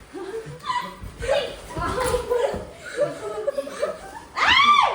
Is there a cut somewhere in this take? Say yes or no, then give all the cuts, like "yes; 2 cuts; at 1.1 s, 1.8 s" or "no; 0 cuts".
no; 0 cuts